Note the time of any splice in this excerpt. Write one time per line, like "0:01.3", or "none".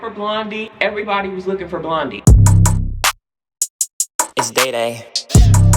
0:02.2